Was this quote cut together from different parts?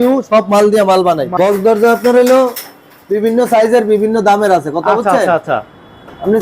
yes; 1 cut; at 1.3 s

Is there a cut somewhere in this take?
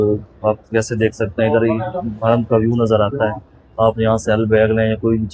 no; 0 cuts

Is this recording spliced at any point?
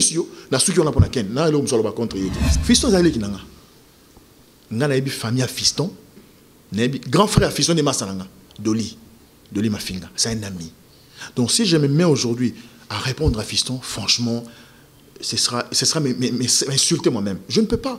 yes; 1 cut; at 2.5 s

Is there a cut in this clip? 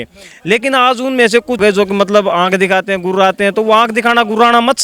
yes; 1 cut; at 1.6 s

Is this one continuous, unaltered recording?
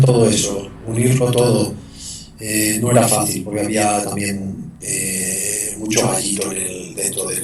yes; 0 cuts

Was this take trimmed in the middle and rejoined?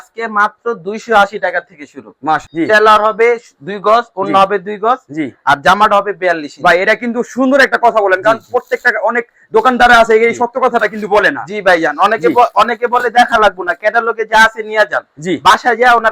yes; 1 cut; at 2.5 s

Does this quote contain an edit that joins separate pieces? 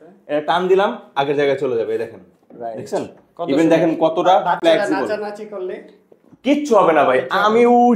no; 0 cuts

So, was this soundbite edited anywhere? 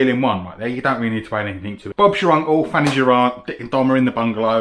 yes; 1 cut; at 1.9 s

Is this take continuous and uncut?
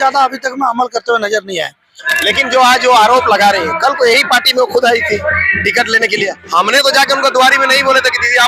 no; 1 cut; at 2.1 s

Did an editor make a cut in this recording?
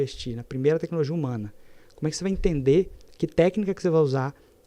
no; 0 cuts

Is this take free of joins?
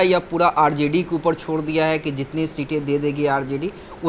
yes; 0 cuts

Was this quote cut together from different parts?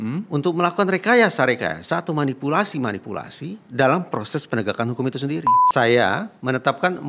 yes; 1 cut; at 5.6 s

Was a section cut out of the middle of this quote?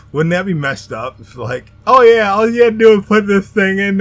no; 0 cuts

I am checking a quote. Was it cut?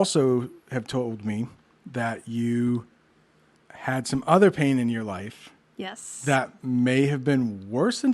no; 0 cuts

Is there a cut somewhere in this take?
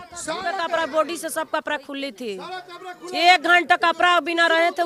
no; 0 cuts

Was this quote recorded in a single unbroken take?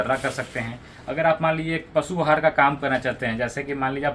yes; 0 cuts

